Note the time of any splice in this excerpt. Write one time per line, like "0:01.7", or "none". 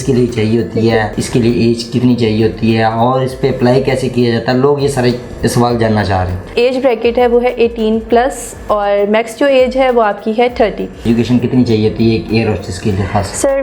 0:01.2
0:06.5
0:11.1